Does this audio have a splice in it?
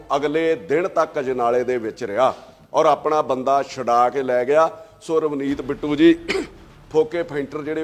no; 0 cuts

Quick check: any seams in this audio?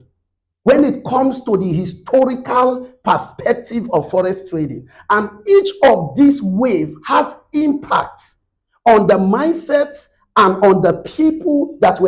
no; 0 cuts

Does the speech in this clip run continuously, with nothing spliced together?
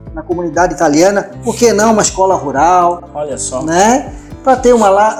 yes; 0 cuts

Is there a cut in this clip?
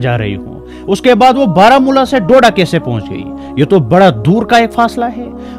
no; 0 cuts

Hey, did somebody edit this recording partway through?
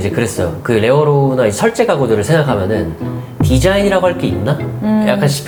no; 0 cuts

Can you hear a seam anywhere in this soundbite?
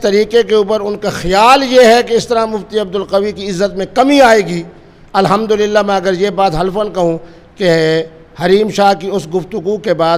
no; 0 cuts

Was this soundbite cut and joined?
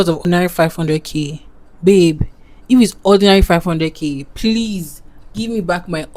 no; 0 cuts

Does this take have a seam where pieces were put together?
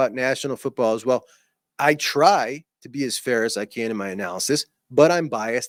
no; 0 cuts

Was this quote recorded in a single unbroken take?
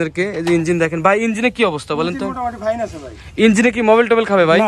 yes; 0 cuts

